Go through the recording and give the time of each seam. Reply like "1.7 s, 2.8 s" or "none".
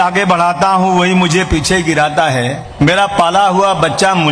2.6 s